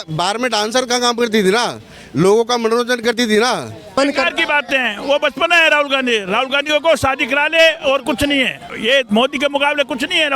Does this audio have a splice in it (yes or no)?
yes